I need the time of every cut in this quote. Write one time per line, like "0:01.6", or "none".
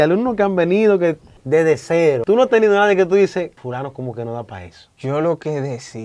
0:01.3
0:02.2
0:03.6
0:04.9